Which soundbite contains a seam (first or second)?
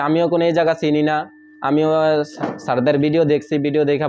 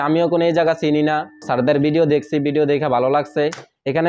second